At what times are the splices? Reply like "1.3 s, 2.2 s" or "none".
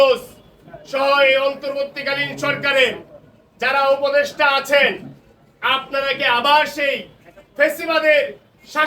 none